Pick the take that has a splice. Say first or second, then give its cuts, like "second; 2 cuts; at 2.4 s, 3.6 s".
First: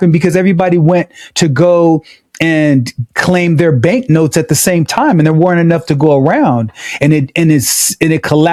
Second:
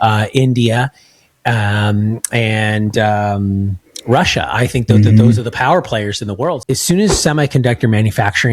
second; 1 cut; at 6.6 s